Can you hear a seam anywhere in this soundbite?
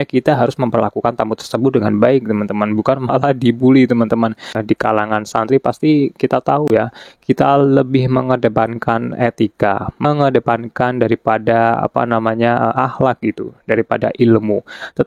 no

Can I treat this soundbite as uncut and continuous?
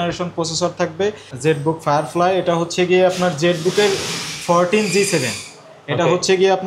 no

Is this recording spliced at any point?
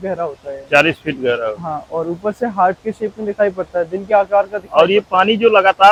no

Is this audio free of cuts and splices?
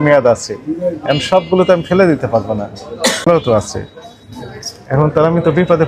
no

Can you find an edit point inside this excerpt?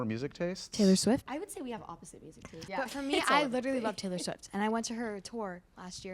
yes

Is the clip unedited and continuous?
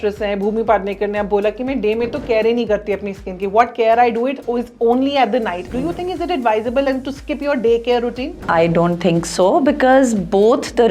no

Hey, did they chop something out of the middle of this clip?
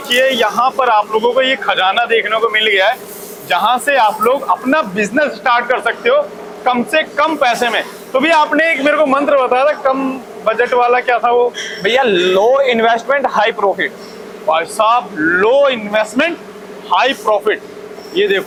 no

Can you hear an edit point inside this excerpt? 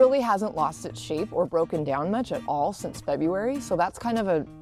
no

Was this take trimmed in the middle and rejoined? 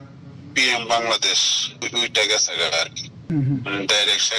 yes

